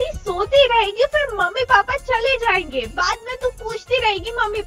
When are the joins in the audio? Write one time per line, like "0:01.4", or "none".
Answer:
none